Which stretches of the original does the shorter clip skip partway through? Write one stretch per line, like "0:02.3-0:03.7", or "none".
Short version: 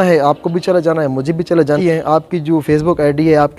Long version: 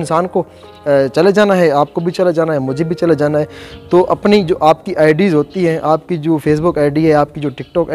0:03.3-0:05.6